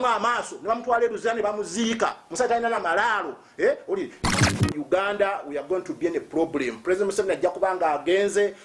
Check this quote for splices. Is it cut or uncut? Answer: cut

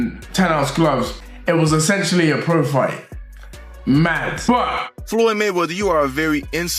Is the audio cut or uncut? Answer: cut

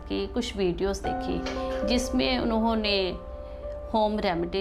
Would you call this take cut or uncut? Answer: uncut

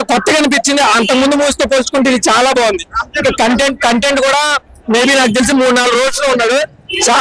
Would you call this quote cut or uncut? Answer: uncut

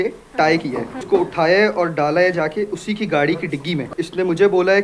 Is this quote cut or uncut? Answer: cut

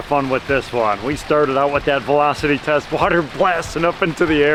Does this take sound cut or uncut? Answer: uncut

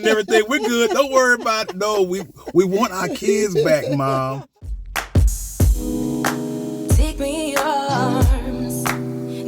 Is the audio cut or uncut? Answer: cut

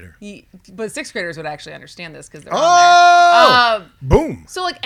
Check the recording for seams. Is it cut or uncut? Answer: uncut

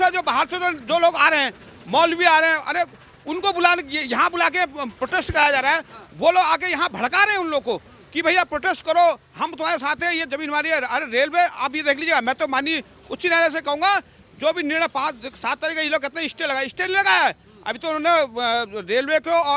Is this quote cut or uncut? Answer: uncut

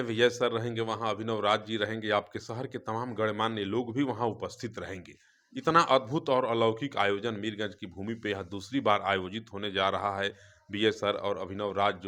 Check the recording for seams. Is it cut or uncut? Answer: uncut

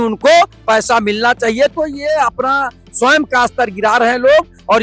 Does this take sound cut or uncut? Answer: uncut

